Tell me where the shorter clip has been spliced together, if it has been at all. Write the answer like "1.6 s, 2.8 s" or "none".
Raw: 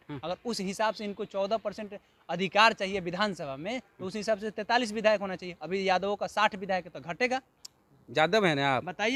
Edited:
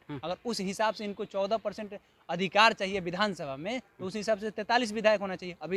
none